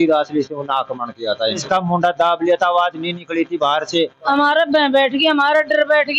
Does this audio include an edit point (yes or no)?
yes